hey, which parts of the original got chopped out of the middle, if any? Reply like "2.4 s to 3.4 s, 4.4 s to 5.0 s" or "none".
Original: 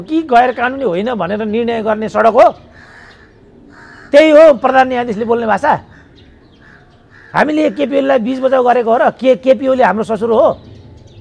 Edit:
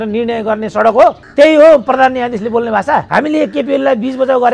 2.6 s to 4.0 s, 5.8 s to 7.3 s